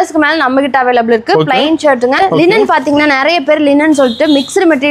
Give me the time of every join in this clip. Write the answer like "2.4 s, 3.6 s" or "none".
2.2 s